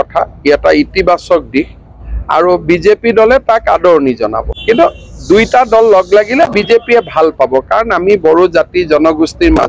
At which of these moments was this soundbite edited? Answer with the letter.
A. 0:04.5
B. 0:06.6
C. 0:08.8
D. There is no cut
A